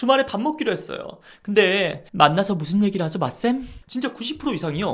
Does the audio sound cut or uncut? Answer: cut